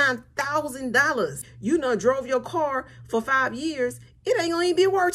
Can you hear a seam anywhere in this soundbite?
yes; 1 cut; at 1.5 s

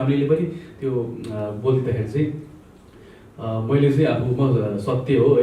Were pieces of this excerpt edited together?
no; 0 cuts

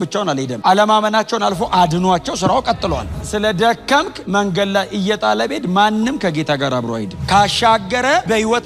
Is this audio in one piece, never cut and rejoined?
no; 2 cuts; at 3.1 s, 7.1 s

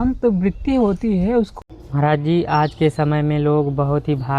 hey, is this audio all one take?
no; 1 cut; at 1.5 s

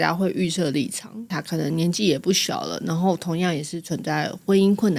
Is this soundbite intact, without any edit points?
yes; 0 cuts

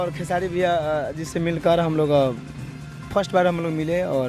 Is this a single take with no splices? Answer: yes; 0 cuts

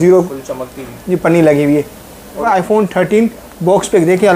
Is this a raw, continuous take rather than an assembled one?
no; 1 cut; at 2.4 s

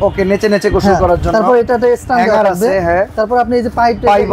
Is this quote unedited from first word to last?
yes; 0 cuts

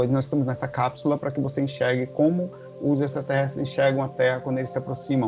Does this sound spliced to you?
no; 0 cuts

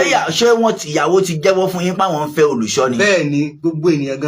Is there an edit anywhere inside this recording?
no; 0 cuts

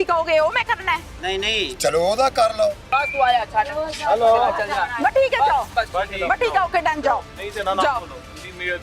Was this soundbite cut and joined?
yes; 2 cuts; at 2.8 s, 5.7 s

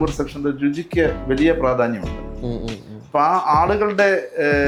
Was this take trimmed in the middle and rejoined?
no; 0 cuts

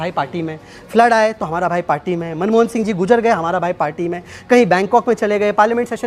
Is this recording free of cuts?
yes; 0 cuts

